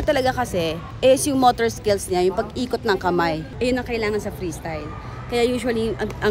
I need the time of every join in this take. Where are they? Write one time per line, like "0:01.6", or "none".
0:03.5